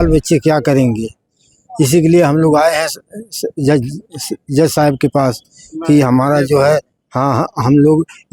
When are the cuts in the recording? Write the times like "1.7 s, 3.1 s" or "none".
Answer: none